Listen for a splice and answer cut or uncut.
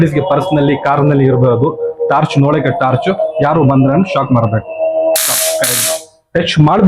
uncut